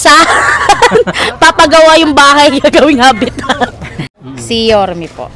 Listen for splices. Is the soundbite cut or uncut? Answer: cut